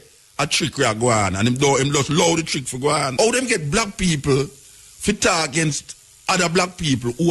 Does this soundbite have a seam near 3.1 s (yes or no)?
yes